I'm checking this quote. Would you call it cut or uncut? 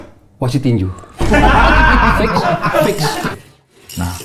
cut